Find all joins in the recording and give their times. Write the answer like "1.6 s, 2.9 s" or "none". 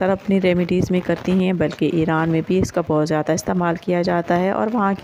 none

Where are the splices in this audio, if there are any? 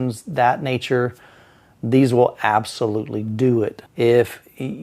3.8 s

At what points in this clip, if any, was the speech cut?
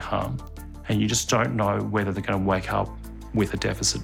none

